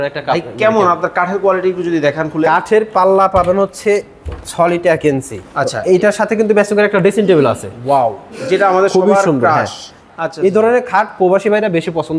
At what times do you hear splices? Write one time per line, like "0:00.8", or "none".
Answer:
0:05.4
0:10.0